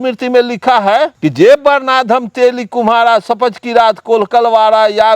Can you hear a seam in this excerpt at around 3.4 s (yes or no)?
no